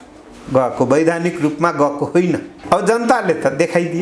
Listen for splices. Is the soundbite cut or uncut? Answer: cut